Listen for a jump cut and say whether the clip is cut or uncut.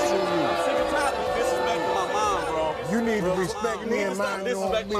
uncut